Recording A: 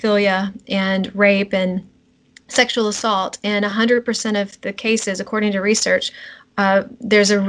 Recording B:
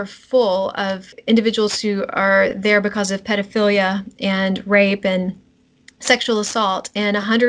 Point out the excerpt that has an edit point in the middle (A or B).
B